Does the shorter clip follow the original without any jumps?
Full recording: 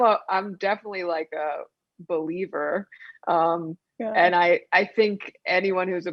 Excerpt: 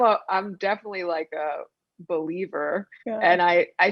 no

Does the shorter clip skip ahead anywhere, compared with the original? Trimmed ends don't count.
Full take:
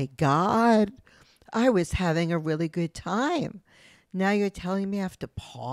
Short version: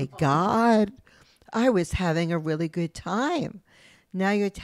no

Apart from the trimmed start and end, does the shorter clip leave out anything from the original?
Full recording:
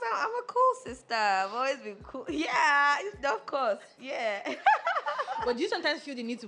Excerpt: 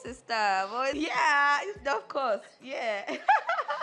yes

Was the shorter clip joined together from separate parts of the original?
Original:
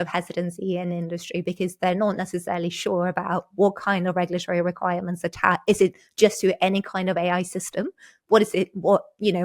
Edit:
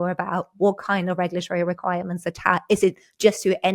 no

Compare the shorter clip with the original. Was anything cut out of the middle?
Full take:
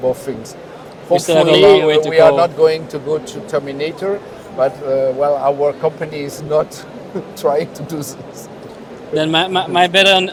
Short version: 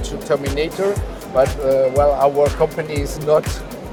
no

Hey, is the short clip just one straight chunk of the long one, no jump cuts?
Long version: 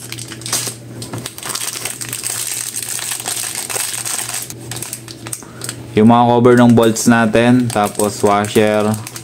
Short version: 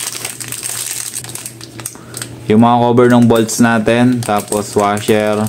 no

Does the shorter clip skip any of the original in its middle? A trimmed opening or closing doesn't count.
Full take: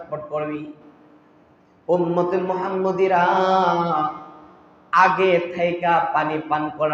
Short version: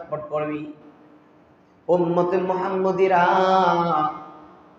no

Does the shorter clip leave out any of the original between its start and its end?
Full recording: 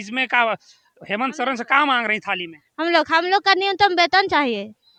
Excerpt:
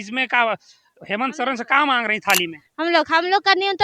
no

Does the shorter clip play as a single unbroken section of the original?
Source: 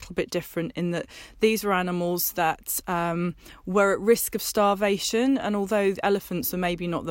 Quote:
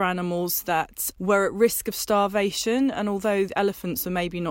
no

